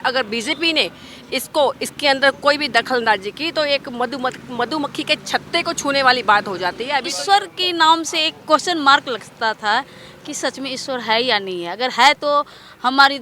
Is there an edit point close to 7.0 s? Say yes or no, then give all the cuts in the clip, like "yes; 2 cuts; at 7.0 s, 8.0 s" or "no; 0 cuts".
yes; 1 cut; at 7.0 s